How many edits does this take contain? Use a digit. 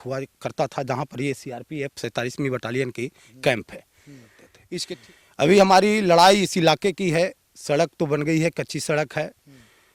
1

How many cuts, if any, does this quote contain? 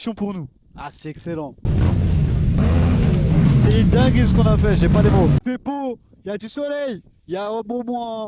3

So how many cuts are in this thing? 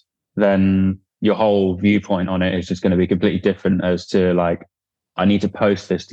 0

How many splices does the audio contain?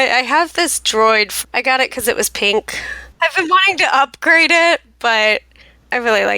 2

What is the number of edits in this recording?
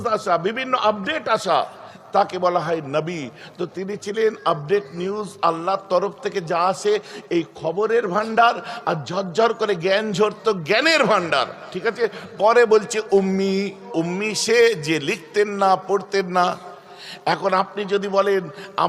1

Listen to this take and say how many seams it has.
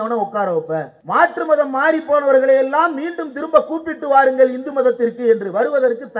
1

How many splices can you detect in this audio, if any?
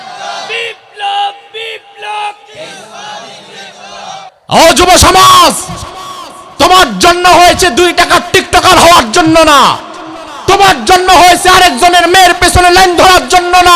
1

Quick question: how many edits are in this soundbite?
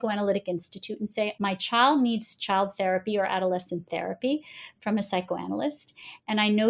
1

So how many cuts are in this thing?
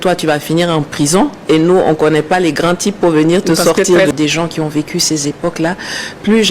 1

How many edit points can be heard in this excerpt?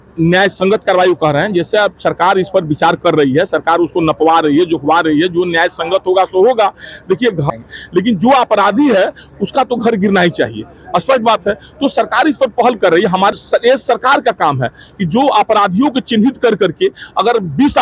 2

